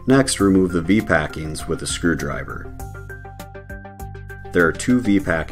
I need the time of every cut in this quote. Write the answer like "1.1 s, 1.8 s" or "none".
2.6 s, 4.5 s